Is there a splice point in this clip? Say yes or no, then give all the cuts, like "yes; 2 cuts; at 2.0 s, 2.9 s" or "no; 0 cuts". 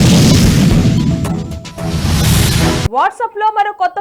no; 0 cuts